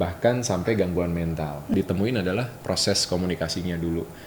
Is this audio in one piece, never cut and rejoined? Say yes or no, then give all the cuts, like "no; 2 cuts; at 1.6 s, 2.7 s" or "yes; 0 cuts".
no; 1 cut; at 1.7 s